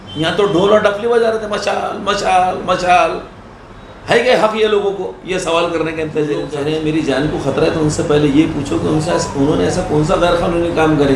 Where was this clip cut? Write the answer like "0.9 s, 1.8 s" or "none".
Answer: 6.5 s